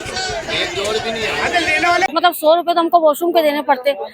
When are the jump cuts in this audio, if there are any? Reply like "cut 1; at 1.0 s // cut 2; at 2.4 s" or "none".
cut 1; at 2.0 s